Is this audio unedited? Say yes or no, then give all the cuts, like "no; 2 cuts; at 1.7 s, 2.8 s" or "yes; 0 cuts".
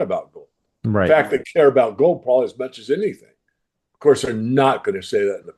yes; 0 cuts